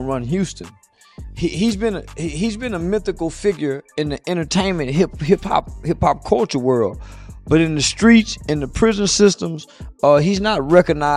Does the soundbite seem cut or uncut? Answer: uncut